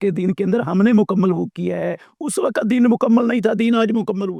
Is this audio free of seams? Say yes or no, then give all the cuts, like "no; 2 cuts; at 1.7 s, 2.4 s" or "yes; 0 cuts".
yes; 0 cuts